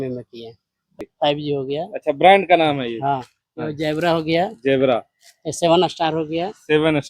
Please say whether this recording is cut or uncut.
cut